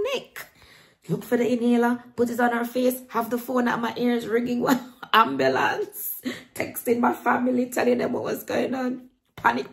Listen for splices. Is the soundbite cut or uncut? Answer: uncut